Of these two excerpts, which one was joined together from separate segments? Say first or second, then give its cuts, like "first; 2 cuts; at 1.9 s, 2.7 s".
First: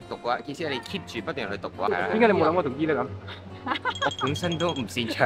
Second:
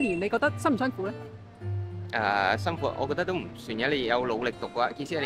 first; 1 cut; at 1.9 s